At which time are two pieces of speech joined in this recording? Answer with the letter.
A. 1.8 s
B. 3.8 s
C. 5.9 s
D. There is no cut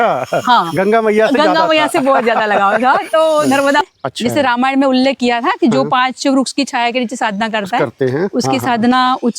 B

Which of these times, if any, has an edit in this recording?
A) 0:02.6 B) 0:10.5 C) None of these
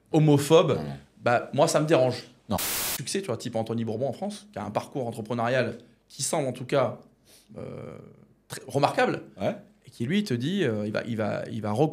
A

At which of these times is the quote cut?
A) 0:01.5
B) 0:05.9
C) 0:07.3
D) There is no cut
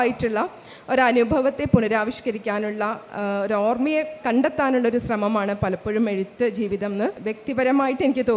C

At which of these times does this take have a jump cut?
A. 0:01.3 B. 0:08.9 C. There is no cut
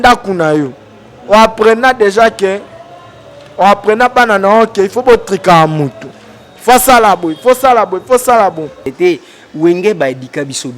B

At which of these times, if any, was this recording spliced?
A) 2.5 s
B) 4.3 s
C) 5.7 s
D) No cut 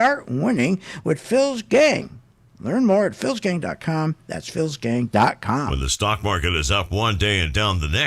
C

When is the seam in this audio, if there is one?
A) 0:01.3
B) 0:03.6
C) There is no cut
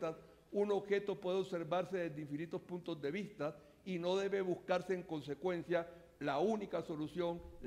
A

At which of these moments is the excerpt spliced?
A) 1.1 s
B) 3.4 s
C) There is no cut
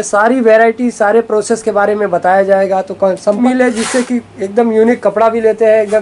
B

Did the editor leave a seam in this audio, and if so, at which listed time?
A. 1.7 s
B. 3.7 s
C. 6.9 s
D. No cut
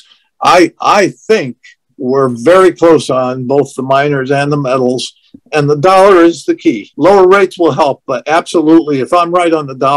C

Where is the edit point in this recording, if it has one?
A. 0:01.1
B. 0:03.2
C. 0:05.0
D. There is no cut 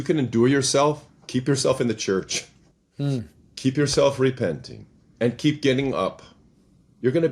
D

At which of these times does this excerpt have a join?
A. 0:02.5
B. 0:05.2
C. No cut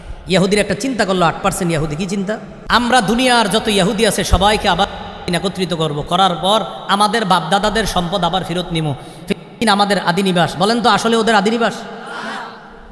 A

